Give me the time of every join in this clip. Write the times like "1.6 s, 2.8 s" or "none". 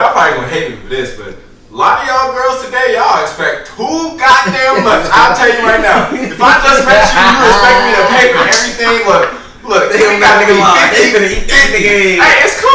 none